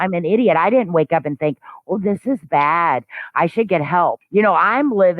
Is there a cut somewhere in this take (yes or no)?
yes